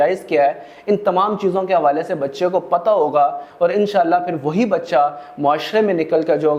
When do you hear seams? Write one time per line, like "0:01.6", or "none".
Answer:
none